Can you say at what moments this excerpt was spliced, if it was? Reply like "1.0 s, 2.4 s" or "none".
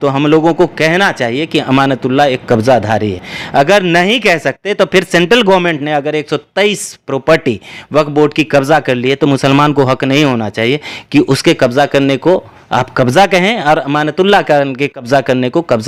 none

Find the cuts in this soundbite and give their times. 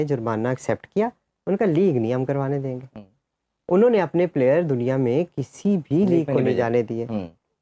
none

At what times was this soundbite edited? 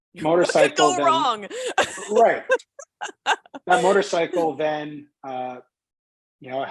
none

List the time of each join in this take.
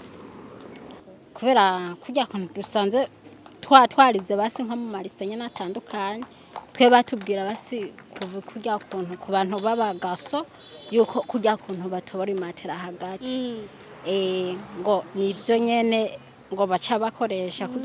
none

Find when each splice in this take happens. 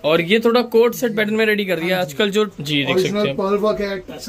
2.5 s

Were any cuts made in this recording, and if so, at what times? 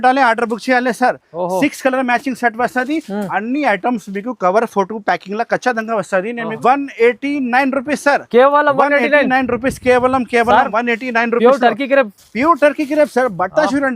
6.6 s

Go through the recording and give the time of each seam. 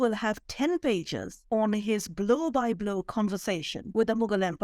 3.8 s

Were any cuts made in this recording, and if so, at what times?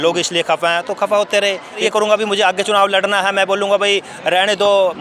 1.8 s

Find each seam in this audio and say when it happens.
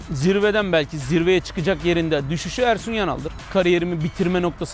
3.3 s

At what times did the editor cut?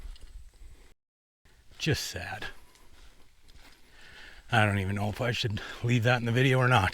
1.4 s, 4.0 s

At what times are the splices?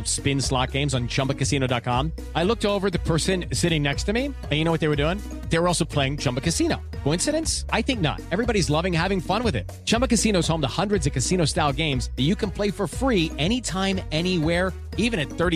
none

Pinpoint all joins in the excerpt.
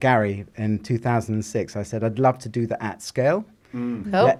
none

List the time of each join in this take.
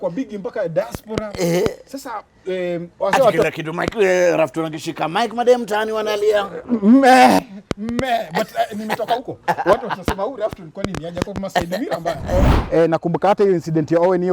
12.5 s

